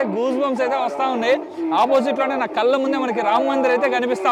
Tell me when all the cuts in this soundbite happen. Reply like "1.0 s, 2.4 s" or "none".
none